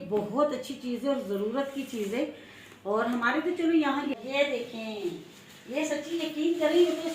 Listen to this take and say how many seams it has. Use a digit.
1